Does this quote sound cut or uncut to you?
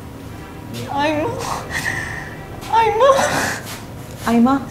uncut